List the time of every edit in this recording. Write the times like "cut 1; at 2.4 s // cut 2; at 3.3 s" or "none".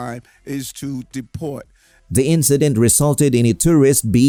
none

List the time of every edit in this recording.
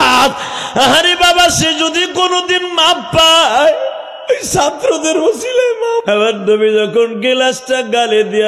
cut 1; at 6.0 s

